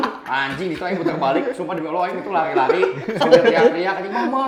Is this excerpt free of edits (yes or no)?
yes